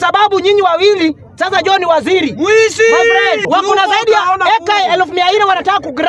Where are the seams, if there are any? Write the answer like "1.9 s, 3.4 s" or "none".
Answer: 3.4 s